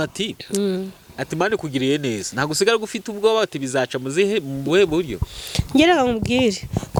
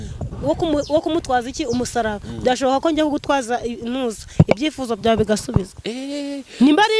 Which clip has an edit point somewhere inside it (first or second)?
second